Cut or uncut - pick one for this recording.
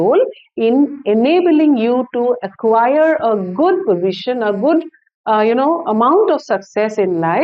uncut